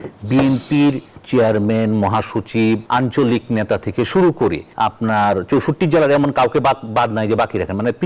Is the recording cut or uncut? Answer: cut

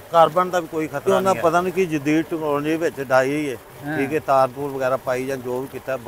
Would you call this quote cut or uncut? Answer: cut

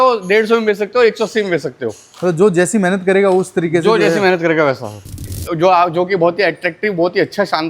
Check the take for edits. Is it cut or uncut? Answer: cut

